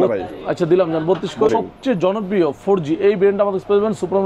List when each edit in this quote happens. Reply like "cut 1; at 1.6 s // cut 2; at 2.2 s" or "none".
cut 1; at 1.5 s